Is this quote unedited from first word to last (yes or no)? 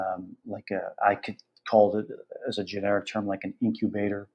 yes